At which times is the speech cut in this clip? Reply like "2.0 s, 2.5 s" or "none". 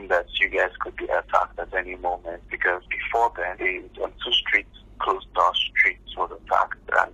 none

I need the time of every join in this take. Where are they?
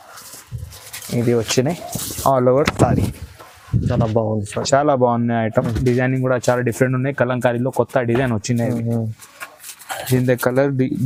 none

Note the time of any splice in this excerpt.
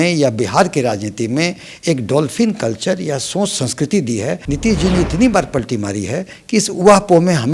4.4 s

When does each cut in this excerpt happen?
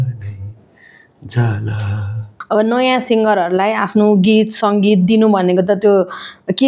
2.3 s

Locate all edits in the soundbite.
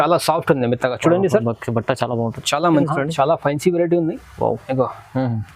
2.9 s

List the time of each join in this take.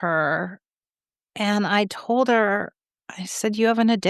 none

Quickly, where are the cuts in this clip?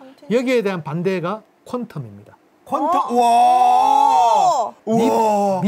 4.8 s

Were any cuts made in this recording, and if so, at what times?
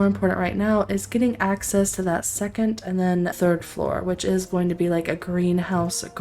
3.4 s

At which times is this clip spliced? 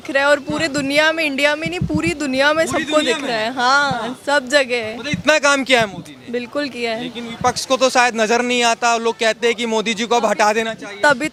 none

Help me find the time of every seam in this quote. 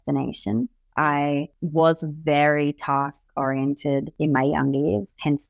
1.6 s, 4.1 s

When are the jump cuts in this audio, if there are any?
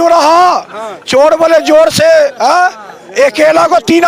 none

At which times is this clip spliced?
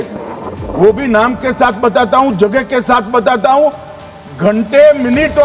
none

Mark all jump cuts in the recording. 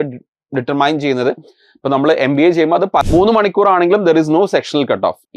3.0 s

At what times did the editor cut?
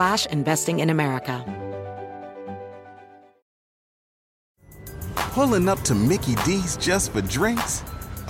1.4 s

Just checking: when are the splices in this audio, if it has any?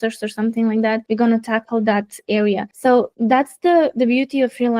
1.0 s, 2.9 s

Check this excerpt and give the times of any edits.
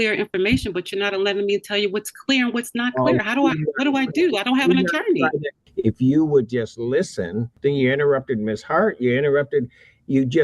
5.6 s, 7.5 s

